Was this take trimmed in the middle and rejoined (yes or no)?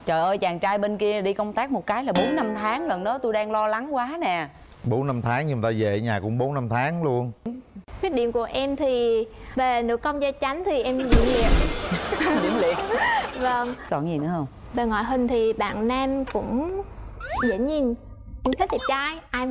yes